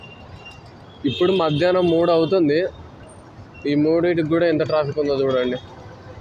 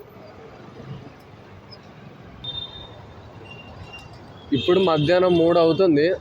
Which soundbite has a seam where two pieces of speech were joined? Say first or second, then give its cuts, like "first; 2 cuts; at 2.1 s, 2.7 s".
second; 1 cut; at 2.4 s